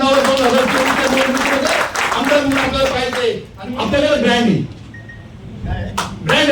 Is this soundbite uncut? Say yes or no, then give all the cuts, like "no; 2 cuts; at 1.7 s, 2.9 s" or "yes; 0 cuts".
no; 1 cut; at 3.5 s